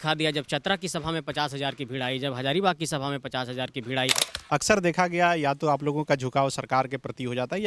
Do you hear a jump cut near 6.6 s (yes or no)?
no